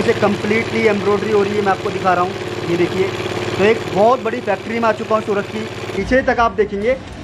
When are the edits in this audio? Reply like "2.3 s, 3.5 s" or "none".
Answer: 5.9 s